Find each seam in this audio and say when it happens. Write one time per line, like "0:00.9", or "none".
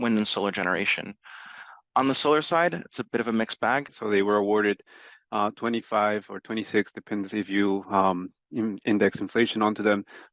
0:04.0